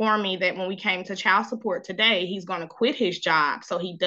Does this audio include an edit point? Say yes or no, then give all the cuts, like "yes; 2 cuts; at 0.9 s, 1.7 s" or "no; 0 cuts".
no; 0 cuts